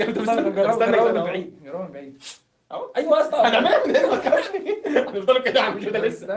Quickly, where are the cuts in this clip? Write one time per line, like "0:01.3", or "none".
none